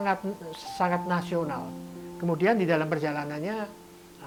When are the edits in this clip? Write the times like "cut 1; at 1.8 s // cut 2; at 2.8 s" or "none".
none